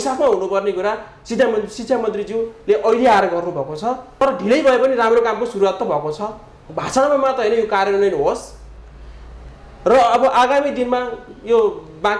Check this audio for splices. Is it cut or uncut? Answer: cut